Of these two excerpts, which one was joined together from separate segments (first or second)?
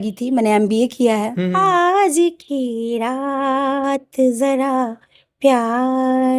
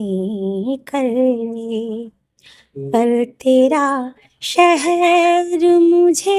first